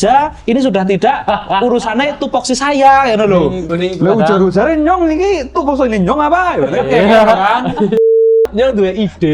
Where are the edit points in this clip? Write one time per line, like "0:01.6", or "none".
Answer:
0:03.6
0:08.4

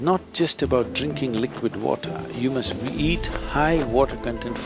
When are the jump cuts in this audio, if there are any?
none

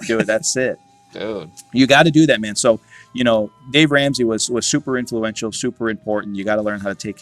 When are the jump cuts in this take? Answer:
none

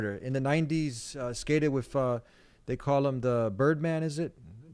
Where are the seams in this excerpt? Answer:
none

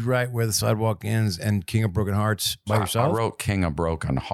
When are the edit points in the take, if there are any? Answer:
0:02.9

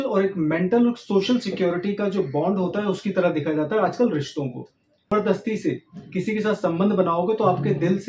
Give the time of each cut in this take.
0:05.1

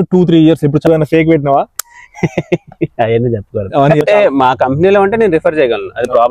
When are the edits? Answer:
0:00.8
0:04.0

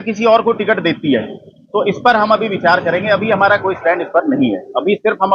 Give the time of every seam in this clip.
none

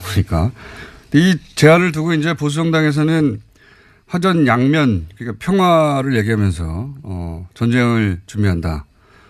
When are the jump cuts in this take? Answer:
none

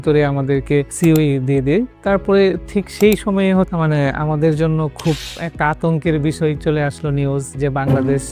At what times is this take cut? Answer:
0:00.9
0:03.7

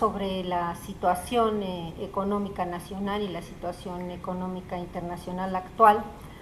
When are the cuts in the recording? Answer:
0:05.5

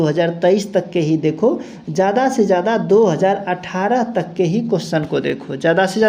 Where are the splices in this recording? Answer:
none

